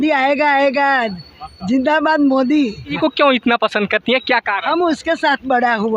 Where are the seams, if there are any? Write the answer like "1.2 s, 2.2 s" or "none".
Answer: 3.0 s